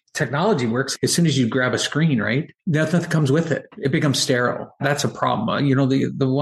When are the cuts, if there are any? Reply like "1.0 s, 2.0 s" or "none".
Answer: 0.9 s, 2.5 s, 3.7 s, 4.8 s